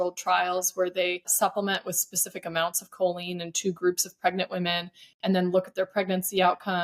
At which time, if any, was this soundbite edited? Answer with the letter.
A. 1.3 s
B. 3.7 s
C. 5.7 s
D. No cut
A